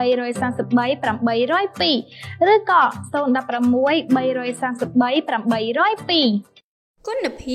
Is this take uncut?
yes; 0 cuts

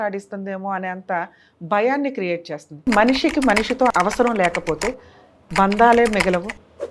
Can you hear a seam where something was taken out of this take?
yes; 2 cuts; at 2.9 s, 3.9 s

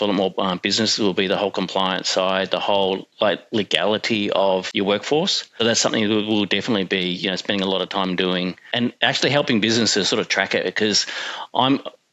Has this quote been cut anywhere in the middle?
yes; 3 cuts; at 4.7 s, 5.6 s, 8.7 s

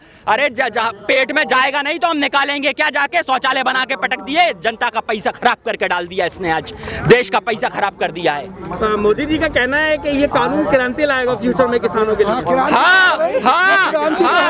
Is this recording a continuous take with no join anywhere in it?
yes; 0 cuts

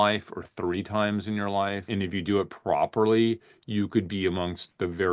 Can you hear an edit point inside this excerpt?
yes; 1 cut; at 1.9 s

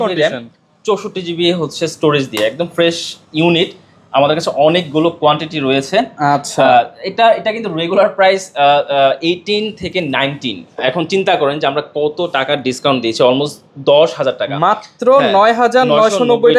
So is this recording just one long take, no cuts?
yes; 0 cuts

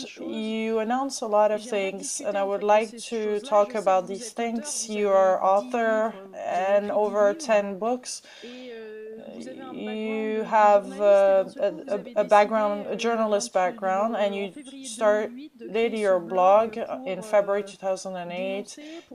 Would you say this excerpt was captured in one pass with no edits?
yes; 0 cuts

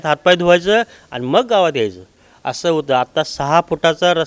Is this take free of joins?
yes; 0 cuts

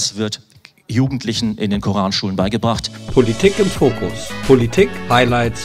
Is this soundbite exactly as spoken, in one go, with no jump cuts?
no; 1 cut; at 2.9 s

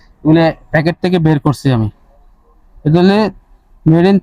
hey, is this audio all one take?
yes; 0 cuts

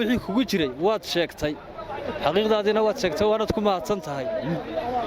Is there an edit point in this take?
no; 0 cuts

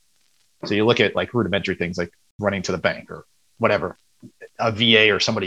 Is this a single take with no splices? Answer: no; 1 cut; at 2.2 s

